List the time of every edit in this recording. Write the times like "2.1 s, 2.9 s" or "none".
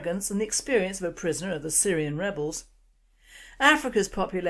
1.3 s